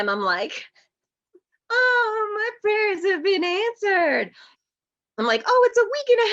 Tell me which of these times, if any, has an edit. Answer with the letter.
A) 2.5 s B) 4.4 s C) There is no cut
B